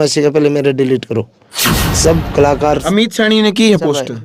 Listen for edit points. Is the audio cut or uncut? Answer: cut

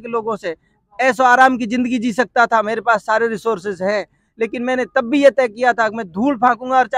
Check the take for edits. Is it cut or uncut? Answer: uncut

